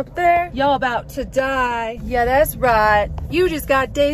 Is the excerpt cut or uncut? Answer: cut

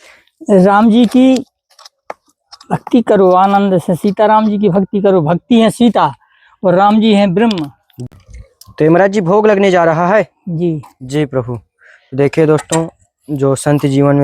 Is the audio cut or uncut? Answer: cut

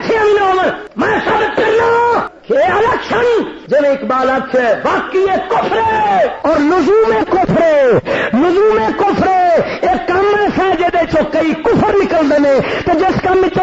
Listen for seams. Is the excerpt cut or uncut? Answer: cut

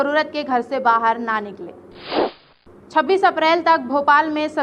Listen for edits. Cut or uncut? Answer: cut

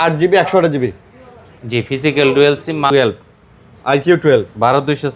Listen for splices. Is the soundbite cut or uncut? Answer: cut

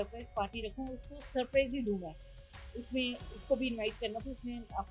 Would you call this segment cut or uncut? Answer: uncut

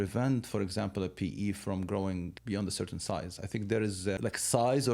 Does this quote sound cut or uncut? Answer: cut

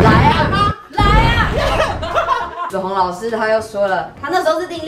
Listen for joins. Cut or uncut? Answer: cut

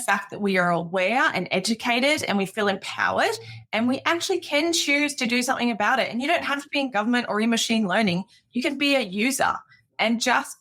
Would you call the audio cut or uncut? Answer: uncut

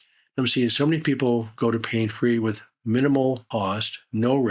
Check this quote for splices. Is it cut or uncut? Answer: cut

